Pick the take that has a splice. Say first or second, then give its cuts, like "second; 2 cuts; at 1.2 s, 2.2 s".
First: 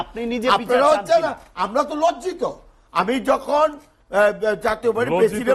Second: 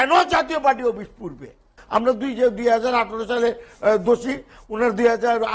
second; 1 cut; at 1.8 s